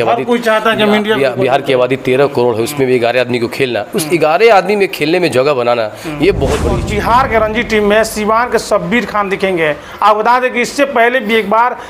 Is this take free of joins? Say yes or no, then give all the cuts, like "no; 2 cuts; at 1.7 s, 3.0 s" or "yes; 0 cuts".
no; 1 cut; at 6.8 s